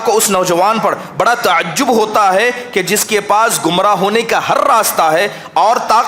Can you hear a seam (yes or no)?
no